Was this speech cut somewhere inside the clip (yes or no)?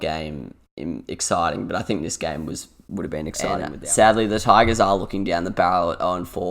yes